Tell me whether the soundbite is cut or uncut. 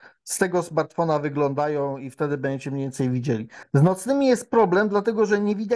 cut